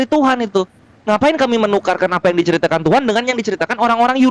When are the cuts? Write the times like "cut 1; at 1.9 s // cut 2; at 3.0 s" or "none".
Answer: none